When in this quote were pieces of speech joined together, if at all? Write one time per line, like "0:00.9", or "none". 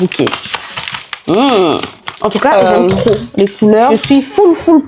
0:03.9